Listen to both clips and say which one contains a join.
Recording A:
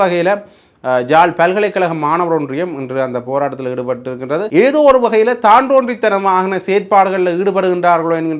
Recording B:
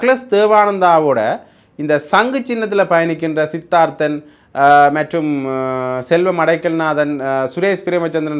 A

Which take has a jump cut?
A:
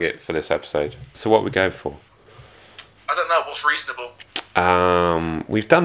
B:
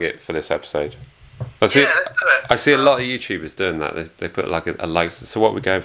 A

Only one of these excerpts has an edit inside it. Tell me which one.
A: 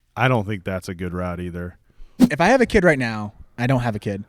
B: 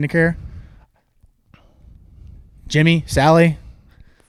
A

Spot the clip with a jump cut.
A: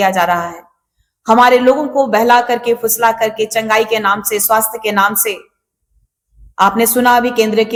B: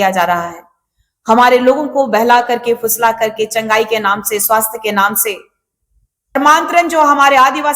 B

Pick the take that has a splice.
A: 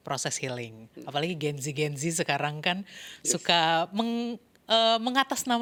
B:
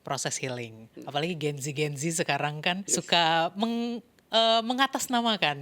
B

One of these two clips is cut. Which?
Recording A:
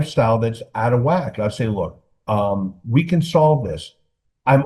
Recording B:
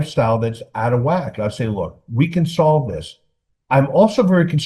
B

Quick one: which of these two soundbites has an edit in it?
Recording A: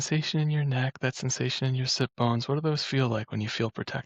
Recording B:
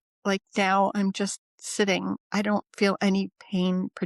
B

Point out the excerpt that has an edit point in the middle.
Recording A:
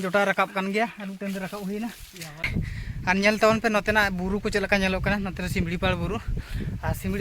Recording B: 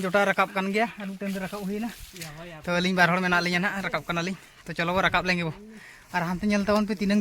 A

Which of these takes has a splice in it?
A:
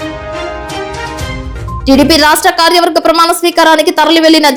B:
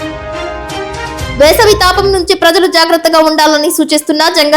B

